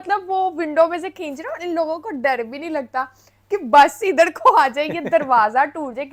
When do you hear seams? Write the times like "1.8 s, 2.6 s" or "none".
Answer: none